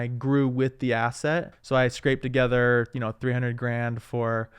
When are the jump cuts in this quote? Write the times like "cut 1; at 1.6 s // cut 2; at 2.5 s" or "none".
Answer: cut 1; at 1.6 s